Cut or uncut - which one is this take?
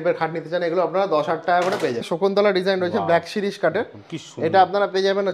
cut